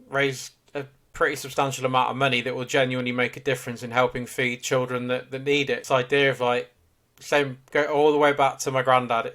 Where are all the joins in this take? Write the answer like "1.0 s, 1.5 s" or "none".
5.8 s